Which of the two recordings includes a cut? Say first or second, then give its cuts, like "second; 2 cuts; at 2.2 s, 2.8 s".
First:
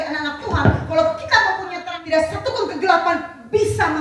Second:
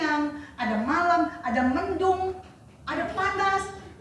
first; 1 cut; at 1.8 s